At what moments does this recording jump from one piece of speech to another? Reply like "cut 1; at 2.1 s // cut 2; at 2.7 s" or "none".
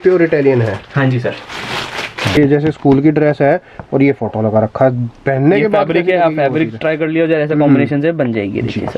cut 1; at 2.4 s